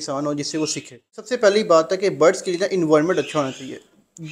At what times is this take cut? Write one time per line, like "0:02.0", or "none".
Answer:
0:01.2